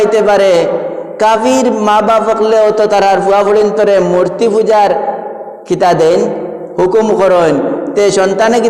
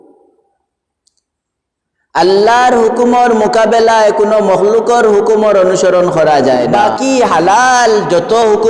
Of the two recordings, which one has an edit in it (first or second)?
second